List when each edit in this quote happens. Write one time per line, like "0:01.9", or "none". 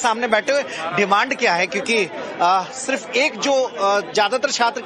0:02.2